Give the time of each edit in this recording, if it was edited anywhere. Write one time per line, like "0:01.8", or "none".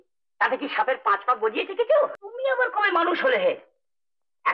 0:02.2